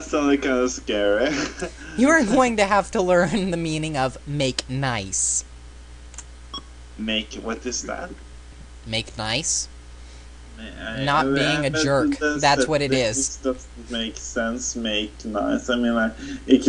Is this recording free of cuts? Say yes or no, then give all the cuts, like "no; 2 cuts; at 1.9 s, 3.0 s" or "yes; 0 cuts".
yes; 0 cuts